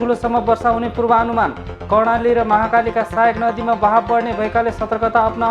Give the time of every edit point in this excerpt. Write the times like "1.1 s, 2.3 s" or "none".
none